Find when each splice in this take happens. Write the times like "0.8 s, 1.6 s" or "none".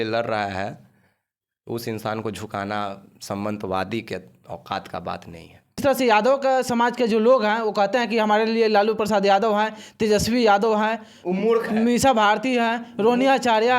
5.8 s